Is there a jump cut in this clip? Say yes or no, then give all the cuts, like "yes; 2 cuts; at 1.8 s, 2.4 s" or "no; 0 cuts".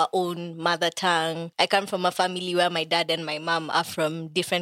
yes; 1 cut; at 1.4 s